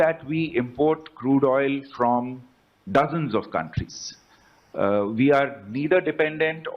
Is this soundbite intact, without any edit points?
yes; 0 cuts

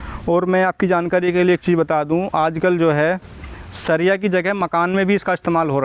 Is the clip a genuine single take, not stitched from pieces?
yes; 0 cuts

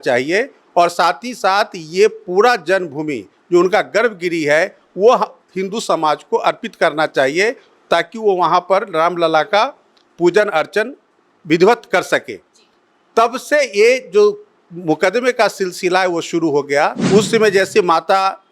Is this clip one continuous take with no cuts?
no; 1 cut; at 17.0 s

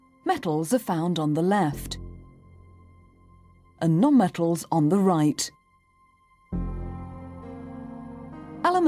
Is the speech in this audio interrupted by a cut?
no; 0 cuts

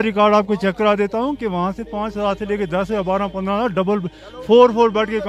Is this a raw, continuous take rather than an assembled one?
yes; 0 cuts

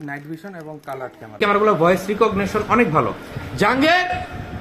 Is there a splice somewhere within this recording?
yes; 1 cut; at 1.4 s

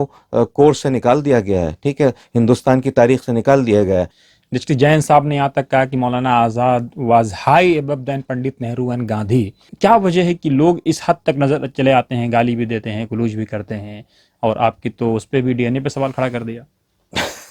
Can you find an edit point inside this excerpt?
yes; 2 cuts; at 4.2 s, 9.6 s

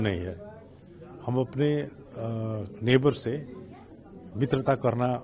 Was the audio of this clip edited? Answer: no; 0 cuts

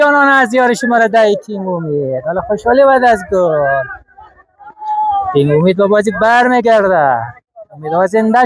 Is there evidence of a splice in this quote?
no; 0 cuts

